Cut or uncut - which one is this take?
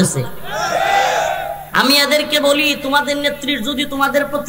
cut